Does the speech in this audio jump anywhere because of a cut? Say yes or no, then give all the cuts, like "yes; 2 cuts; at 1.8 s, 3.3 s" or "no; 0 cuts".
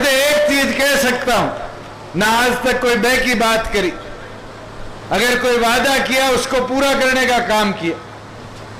no; 0 cuts